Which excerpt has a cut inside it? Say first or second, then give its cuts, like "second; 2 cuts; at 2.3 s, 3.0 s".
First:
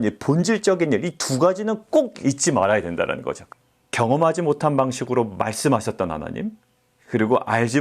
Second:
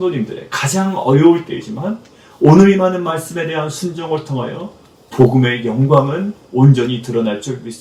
first; 1 cut; at 3.4 s